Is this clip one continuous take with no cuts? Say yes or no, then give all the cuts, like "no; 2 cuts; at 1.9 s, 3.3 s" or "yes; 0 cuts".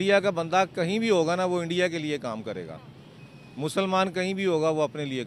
yes; 0 cuts